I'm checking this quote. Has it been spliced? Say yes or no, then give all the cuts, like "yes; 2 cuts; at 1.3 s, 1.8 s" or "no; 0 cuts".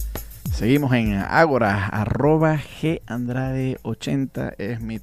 no; 0 cuts